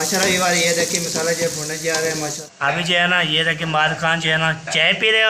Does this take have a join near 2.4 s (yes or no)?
yes